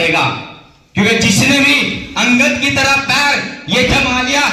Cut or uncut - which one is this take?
uncut